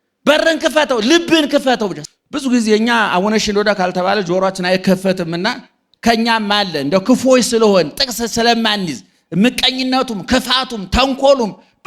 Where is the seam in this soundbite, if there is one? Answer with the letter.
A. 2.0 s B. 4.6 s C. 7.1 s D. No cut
A